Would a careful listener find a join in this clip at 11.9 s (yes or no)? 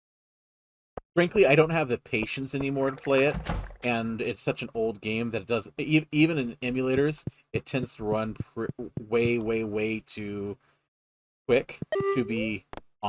yes